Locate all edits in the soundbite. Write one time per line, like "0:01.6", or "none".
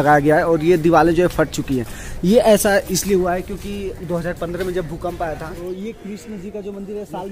0:05.6